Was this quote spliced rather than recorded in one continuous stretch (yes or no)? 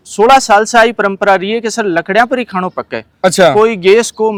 no